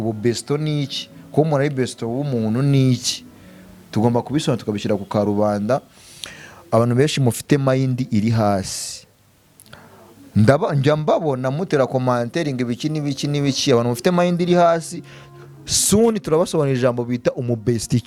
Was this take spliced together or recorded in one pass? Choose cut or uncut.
uncut